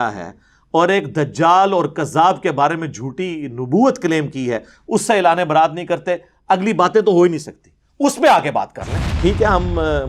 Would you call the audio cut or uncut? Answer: cut